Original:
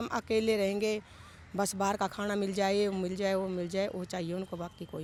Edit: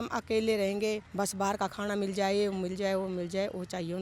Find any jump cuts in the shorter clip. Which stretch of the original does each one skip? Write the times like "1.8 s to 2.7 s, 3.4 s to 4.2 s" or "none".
1.1 s to 1.5 s